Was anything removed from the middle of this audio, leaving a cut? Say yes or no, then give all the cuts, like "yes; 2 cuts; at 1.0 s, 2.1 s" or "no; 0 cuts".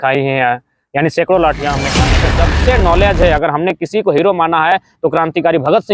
yes; 1 cut; at 2.2 s